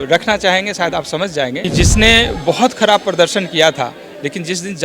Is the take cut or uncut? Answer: cut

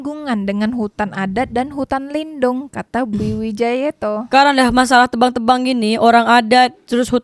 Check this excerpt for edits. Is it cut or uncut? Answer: uncut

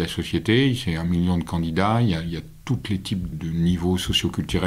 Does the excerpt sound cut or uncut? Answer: cut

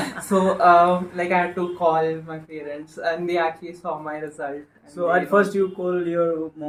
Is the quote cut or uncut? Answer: uncut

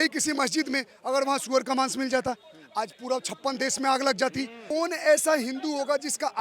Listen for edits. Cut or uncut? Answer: cut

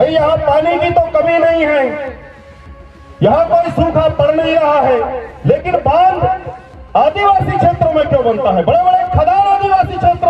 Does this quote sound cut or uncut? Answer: uncut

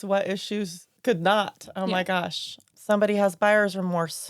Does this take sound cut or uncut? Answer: cut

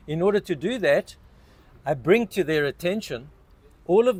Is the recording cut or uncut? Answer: uncut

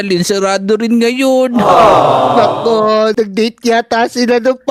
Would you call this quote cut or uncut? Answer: uncut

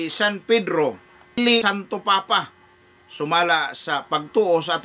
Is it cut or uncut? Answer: cut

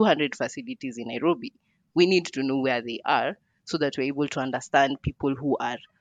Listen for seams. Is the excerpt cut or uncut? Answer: uncut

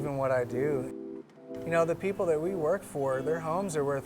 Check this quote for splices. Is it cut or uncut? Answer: cut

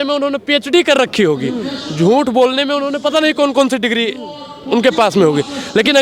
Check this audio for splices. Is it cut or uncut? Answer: uncut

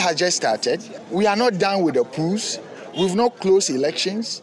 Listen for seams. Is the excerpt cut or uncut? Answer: cut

